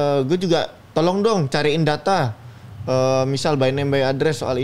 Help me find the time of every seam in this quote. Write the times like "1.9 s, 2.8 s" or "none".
none